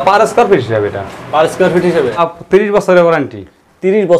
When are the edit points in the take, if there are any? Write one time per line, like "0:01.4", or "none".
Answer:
0:02.2